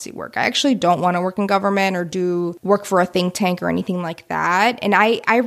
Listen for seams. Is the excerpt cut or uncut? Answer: cut